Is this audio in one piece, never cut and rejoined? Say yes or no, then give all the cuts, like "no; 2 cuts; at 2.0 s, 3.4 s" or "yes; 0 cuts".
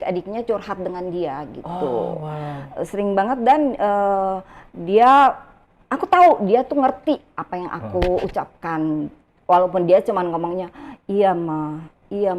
yes; 0 cuts